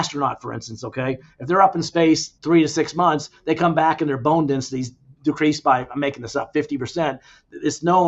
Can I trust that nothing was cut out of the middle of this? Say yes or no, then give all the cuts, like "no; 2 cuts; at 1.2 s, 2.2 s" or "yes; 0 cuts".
no; 1 cut; at 2.3 s